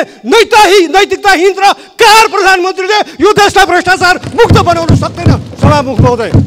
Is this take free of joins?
yes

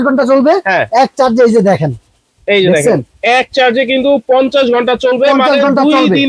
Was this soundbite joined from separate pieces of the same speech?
no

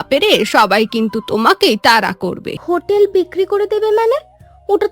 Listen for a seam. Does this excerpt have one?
yes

